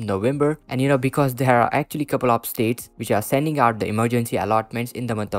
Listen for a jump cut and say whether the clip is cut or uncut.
uncut